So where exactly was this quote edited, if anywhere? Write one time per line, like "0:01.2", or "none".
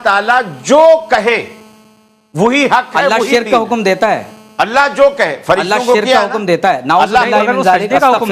none